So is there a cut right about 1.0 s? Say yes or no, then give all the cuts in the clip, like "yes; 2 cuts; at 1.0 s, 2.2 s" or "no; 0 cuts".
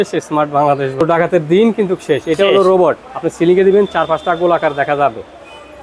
yes; 1 cut; at 1.0 s